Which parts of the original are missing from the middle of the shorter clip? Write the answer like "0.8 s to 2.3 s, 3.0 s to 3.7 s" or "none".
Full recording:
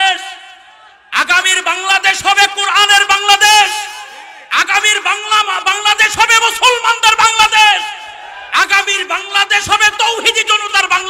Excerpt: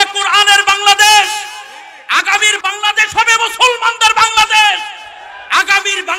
5.0 s to 5.6 s